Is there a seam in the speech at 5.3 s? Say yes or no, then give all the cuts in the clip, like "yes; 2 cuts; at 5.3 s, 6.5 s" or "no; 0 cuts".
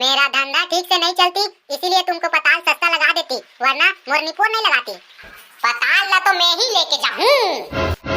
yes; 1 cut; at 5.3 s